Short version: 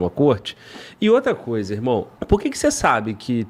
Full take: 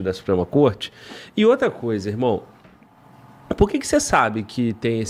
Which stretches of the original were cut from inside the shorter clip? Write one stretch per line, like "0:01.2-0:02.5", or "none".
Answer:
0:02.5-0:03.4